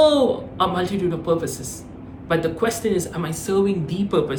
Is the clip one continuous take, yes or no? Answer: yes